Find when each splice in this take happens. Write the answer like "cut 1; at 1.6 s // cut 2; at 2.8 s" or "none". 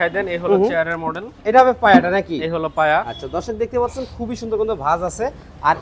none

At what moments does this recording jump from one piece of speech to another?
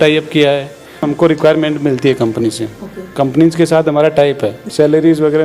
cut 1; at 1.0 s // cut 2; at 4.6 s

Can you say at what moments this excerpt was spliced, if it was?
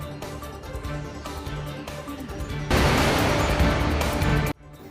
cut 1; at 0.7 s // cut 2; at 2.4 s

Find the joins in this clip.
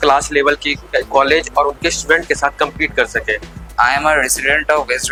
none

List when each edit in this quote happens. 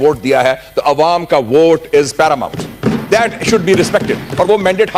none

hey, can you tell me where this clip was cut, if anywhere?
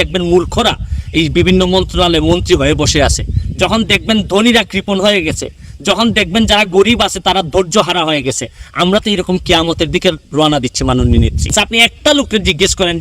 cut 1; at 11.5 s

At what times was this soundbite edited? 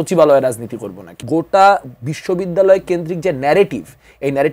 cut 1; at 1.2 s

